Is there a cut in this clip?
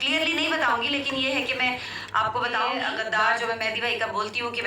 yes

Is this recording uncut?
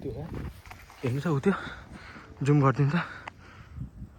yes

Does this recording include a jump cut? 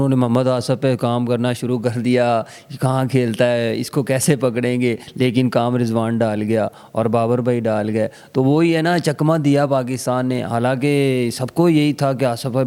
no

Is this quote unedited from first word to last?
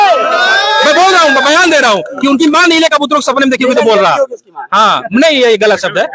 yes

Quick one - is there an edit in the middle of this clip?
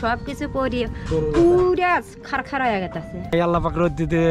yes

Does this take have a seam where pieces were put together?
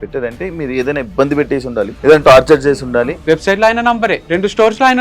yes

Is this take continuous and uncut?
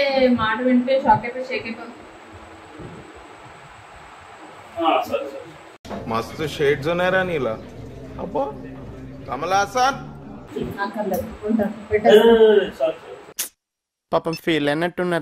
yes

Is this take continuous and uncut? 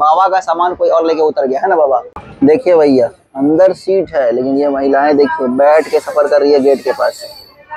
no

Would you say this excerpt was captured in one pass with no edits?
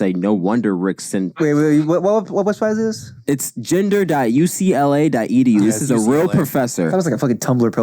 no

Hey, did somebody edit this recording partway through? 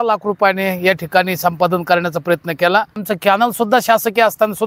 yes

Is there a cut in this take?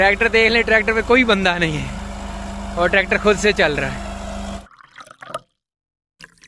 yes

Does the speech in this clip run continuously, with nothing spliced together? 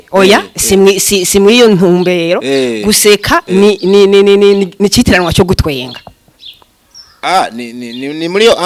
yes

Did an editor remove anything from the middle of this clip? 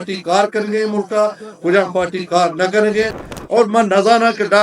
yes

